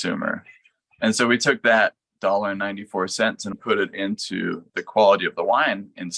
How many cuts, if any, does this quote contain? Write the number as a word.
one